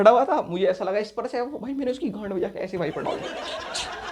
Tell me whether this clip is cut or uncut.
uncut